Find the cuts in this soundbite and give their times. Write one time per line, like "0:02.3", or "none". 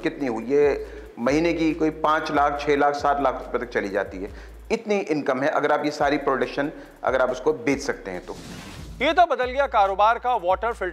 none